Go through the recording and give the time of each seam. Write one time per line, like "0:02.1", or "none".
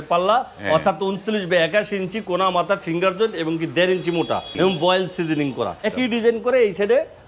0:04.5
0:05.9